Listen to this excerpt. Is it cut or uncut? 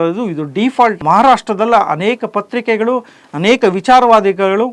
cut